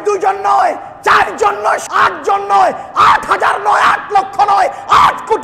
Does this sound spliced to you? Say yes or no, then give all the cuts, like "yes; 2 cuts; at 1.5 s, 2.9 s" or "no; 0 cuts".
yes; 1 cut; at 1.8 s